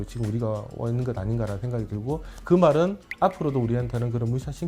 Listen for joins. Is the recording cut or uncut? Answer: uncut